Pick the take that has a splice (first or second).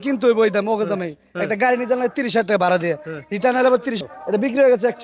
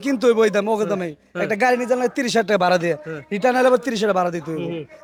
first